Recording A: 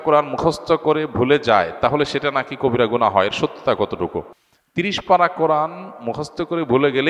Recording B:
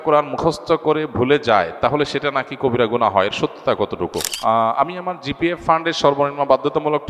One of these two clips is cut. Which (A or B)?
B